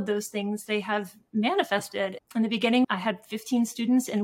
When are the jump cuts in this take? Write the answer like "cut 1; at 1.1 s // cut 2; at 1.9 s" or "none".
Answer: cut 1; at 2.2 s